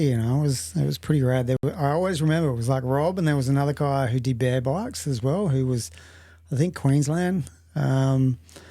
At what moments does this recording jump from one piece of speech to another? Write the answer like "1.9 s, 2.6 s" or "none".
none